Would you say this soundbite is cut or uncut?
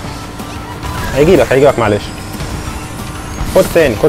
uncut